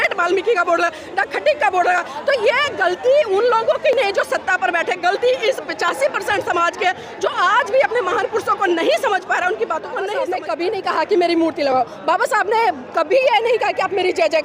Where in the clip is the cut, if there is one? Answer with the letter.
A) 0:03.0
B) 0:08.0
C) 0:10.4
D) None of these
C